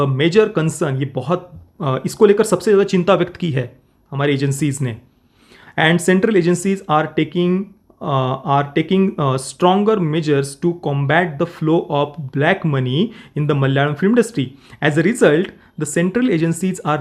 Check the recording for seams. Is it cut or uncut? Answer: uncut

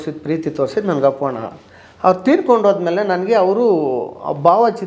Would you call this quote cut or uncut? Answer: uncut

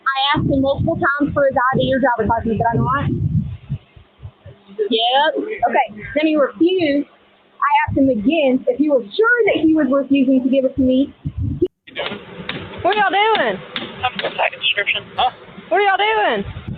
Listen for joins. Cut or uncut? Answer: cut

